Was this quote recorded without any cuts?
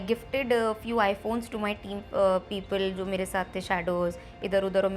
yes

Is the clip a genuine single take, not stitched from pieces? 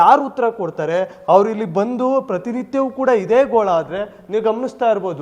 yes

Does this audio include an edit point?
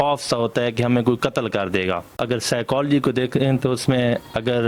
yes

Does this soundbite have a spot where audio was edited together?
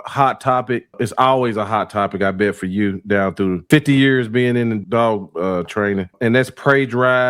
yes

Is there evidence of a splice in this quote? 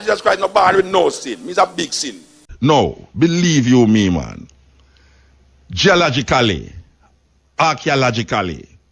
yes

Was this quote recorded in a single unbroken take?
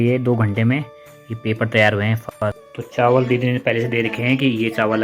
no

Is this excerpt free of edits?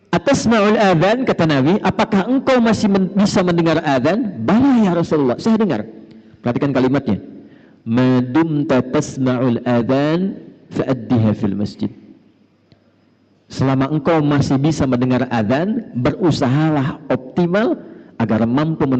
yes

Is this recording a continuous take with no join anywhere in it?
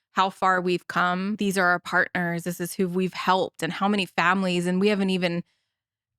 no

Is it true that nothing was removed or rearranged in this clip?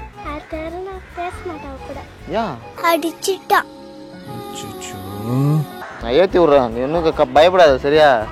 no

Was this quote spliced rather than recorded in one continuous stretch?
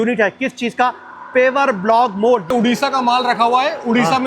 yes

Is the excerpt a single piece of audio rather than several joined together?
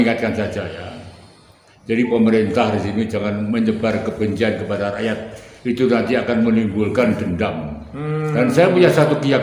yes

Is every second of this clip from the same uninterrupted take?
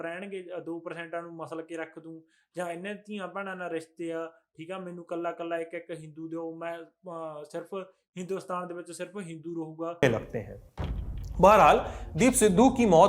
no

